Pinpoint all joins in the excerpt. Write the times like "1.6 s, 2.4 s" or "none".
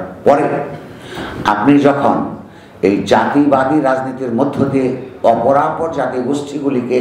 none